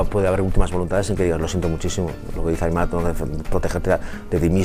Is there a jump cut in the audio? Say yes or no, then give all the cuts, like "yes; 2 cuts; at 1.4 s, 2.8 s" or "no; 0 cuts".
no; 0 cuts